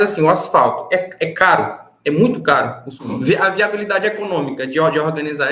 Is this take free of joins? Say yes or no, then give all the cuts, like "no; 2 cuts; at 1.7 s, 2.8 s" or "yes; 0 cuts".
no; 1 cut; at 2.9 s